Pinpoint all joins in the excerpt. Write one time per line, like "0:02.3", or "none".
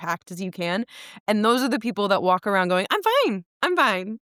none